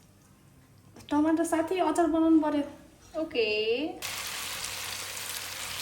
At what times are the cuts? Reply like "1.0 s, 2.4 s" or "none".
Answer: 4.0 s